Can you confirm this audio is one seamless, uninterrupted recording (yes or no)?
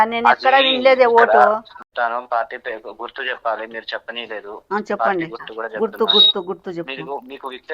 no